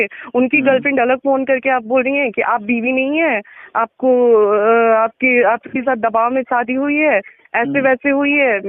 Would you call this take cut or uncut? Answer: uncut